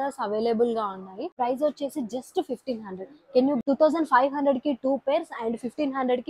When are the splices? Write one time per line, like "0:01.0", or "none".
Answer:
0:01.3
0:03.6

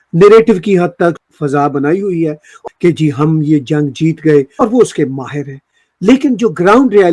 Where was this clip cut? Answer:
0:01.2
0:02.5
0:04.5

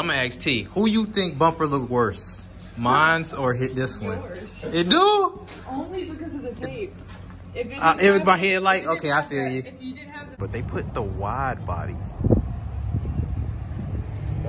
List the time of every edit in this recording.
0:10.4

